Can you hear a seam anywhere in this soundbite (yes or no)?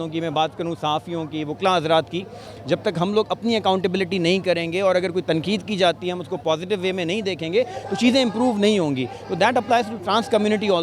no